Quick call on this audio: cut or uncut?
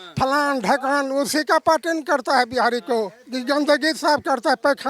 uncut